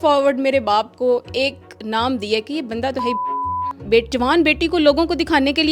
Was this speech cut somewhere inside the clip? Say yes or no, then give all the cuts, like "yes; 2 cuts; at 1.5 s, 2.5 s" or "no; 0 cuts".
yes; 1 cut; at 3.8 s